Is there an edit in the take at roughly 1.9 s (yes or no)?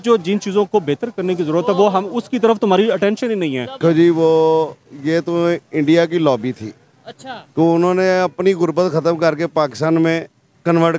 no